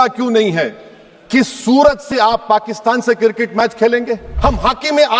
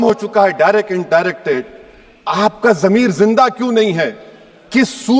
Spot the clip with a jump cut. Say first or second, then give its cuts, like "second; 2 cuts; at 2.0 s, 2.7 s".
first; 1 cut; at 4.2 s